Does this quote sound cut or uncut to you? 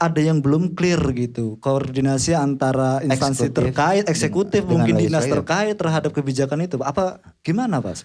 uncut